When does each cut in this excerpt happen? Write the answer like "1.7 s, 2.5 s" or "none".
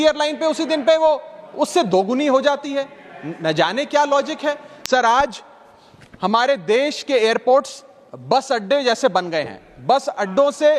4.7 s